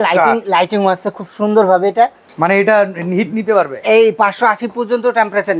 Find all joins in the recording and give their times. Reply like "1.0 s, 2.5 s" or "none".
2.2 s